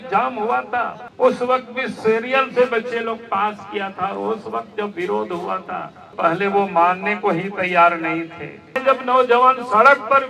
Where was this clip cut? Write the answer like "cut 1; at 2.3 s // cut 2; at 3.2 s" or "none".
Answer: cut 1; at 1.0 s // cut 2; at 6.1 s // cut 3; at 8.8 s